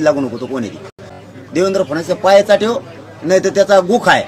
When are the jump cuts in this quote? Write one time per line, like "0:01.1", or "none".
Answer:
0:01.2